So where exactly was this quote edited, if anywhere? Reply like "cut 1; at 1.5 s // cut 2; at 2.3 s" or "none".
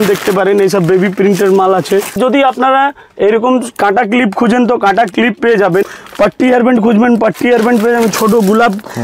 cut 1; at 2.2 s // cut 2; at 6.0 s